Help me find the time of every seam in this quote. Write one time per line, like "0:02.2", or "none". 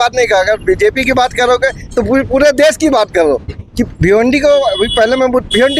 none